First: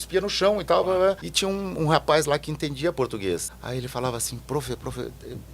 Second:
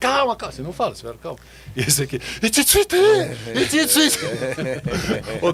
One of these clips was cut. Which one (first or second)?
first